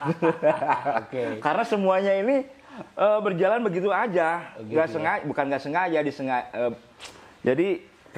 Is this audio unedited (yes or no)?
yes